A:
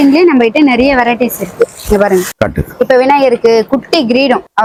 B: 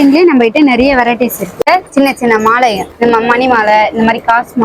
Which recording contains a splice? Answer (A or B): B